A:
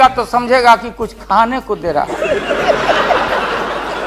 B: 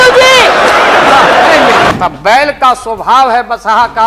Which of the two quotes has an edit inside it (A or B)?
B